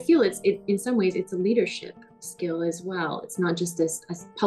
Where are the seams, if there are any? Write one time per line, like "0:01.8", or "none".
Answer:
none